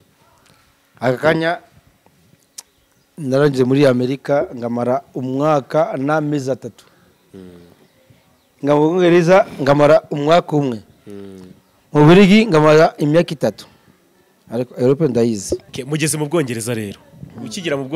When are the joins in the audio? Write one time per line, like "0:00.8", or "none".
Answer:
0:15.7